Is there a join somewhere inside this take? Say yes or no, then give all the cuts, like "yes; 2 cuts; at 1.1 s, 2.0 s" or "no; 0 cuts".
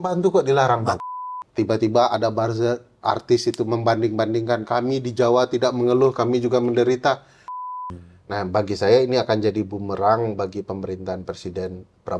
yes; 2 cuts; at 0.9 s, 7.6 s